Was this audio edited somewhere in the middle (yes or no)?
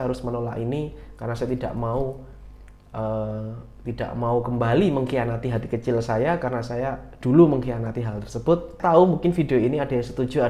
yes